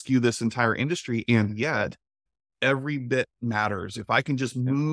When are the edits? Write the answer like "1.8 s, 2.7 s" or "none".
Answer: 2.3 s